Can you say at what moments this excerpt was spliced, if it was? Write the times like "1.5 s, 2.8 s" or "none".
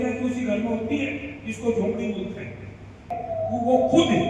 3.1 s